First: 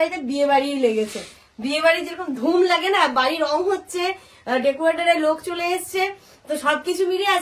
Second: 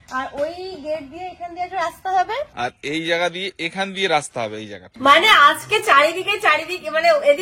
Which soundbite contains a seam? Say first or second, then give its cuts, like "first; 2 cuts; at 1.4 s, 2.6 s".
second; 2 cuts; at 2.5 s, 4.9 s